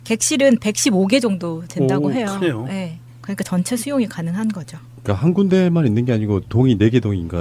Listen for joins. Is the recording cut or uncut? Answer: cut